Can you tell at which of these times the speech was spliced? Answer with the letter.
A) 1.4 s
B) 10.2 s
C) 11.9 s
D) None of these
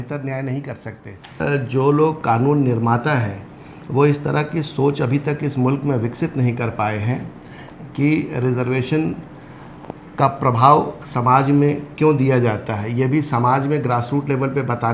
A